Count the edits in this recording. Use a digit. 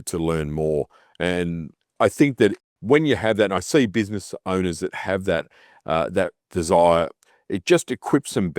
2